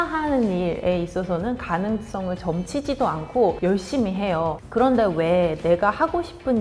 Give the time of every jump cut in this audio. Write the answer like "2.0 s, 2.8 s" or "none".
none